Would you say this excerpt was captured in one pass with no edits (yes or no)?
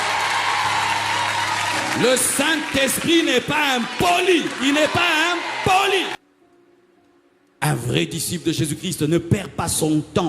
no